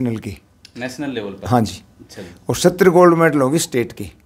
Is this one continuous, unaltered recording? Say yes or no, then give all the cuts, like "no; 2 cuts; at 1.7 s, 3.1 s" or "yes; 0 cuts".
yes; 0 cuts